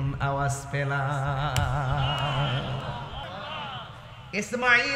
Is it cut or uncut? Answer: cut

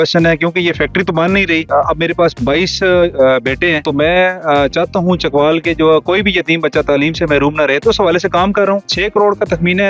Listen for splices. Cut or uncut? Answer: cut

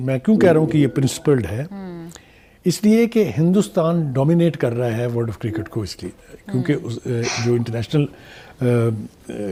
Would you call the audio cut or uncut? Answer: uncut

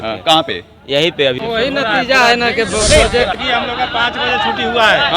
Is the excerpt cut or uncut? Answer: cut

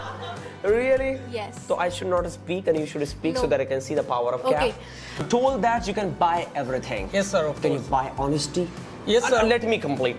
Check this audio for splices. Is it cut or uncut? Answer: cut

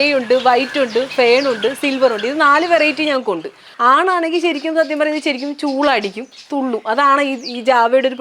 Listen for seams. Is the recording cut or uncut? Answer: cut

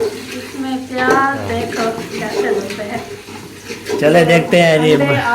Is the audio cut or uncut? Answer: cut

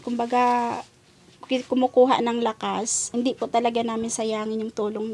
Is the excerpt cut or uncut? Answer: cut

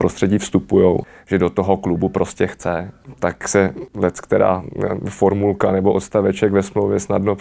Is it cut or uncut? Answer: cut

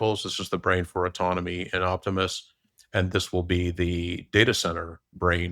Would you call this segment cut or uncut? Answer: uncut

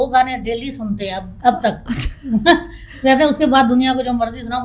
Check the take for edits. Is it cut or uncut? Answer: uncut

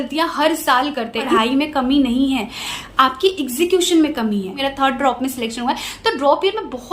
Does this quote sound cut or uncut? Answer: cut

